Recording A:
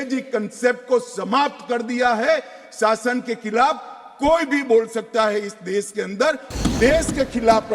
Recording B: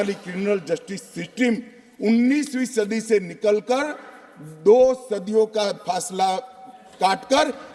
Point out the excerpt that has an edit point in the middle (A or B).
A